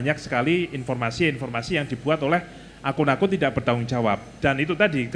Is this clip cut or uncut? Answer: uncut